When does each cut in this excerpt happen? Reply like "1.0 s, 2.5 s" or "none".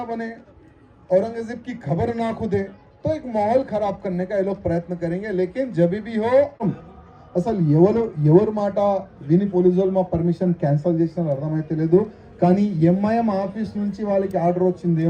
6.6 s